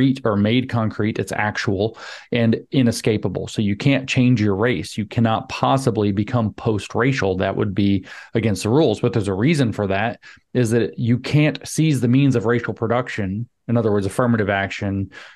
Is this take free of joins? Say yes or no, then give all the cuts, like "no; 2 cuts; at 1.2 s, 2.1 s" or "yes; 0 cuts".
yes; 0 cuts